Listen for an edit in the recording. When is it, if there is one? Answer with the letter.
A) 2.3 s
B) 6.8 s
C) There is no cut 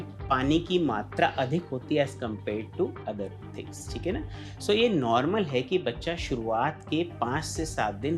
C